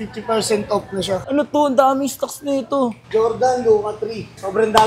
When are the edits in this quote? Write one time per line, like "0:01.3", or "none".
0:01.2